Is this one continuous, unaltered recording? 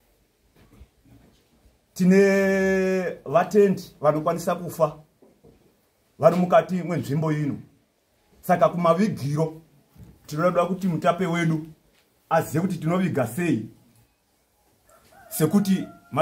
yes; 0 cuts

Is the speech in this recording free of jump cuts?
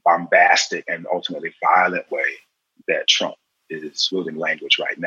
no; 1 cut; at 4.0 s

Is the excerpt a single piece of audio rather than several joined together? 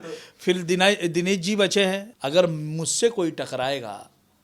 no; 1 cut; at 2.1 s

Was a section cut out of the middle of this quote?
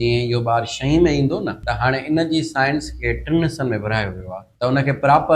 yes; 2 cuts; at 1.6 s, 4.4 s

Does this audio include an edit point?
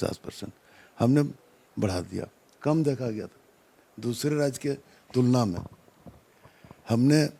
no; 0 cuts

